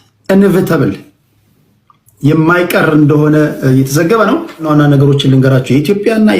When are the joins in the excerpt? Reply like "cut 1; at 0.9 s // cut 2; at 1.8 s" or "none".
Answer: cut 1; at 4.7 s